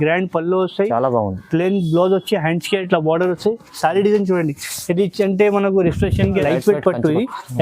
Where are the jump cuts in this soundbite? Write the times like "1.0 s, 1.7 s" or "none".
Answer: 6.4 s